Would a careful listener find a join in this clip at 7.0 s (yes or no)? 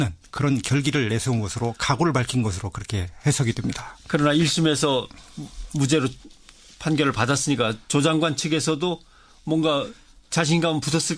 no